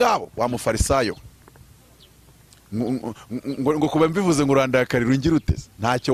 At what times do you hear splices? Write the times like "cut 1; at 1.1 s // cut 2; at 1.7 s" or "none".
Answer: none